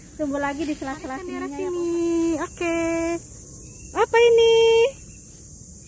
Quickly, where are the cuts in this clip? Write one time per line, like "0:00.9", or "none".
0:01.6